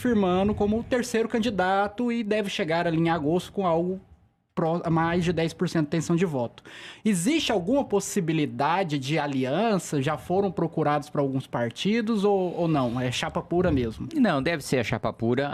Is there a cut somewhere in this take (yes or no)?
no